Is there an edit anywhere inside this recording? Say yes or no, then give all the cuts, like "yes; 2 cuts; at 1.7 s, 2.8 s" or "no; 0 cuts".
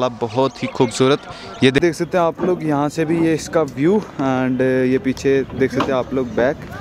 yes; 1 cut; at 1.8 s